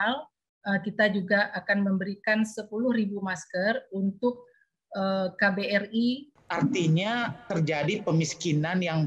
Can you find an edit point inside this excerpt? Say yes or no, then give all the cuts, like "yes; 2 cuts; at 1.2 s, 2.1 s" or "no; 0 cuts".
yes; 1 cut; at 6.3 s